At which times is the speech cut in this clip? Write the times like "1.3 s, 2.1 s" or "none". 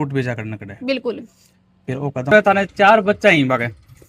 2.3 s